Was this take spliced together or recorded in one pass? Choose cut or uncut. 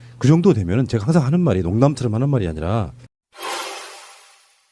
cut